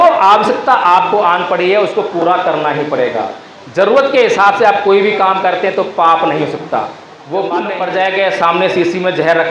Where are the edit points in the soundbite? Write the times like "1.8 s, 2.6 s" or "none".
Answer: 7.7 s